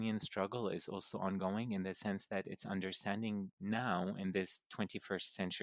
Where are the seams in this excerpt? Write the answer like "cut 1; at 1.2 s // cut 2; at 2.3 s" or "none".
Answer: none